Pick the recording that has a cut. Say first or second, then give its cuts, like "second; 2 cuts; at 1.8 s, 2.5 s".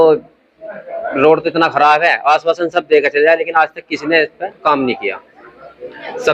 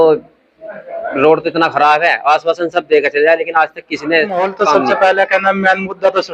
second; 1 cut; at 4.6 s